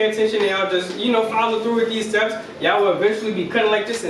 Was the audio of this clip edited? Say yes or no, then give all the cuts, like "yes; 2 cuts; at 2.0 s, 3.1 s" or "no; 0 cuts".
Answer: no; 0 cuts